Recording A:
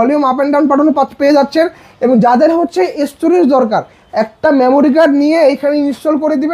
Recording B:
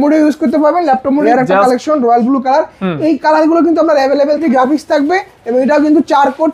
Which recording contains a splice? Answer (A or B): B